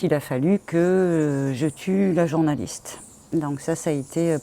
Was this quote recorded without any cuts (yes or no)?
yes